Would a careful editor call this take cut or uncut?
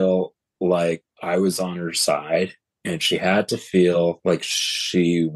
cut